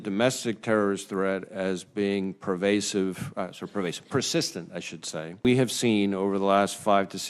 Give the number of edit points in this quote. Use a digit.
1